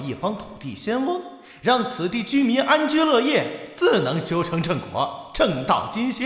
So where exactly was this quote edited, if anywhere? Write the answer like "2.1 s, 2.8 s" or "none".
3.8 s